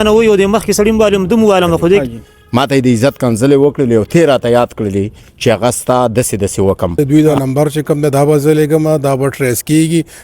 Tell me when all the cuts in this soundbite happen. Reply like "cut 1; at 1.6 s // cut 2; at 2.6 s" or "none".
cut 1; at 2.0 s // cut 2; at 7.0 s